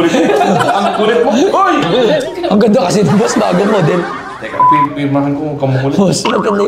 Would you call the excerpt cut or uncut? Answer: uncut